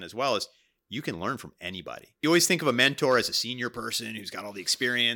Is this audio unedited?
no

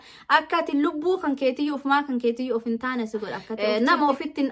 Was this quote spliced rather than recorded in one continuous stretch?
yes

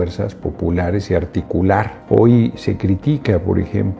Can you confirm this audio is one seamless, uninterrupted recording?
no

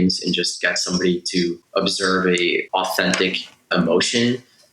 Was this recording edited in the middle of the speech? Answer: yes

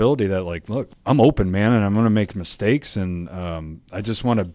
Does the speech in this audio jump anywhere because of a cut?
yes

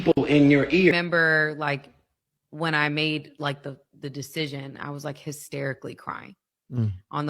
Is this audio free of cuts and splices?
no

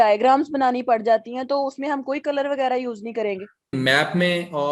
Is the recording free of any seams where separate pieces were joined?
no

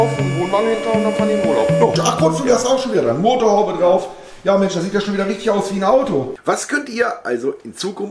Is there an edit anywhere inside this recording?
yes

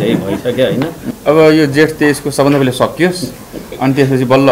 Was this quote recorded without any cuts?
no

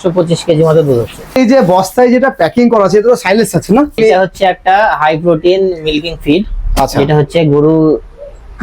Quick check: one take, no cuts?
no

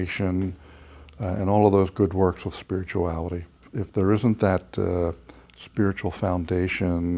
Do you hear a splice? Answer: yes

